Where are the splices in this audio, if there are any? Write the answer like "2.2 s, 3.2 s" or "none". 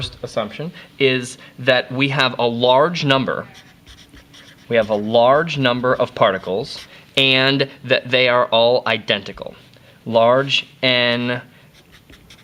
none